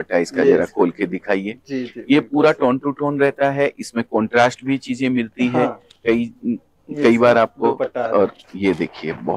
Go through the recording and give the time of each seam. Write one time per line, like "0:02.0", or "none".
none